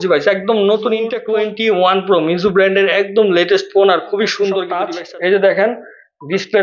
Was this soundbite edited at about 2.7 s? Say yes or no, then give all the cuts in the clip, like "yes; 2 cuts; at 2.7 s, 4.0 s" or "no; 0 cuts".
no; 2 cuts; at 1.2 s, 4.8 s